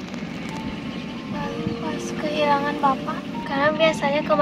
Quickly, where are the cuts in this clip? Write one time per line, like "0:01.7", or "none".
0:03.4